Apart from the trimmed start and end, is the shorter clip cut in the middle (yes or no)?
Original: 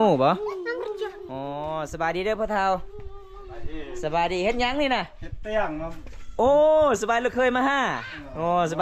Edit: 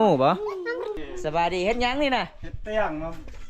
yes